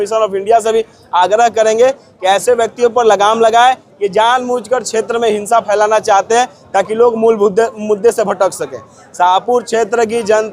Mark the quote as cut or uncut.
uncut